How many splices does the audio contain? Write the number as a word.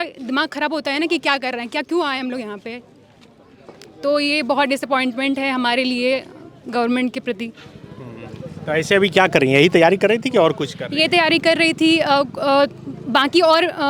zero